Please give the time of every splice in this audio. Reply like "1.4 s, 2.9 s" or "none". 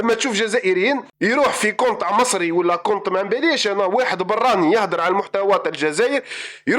1.1 s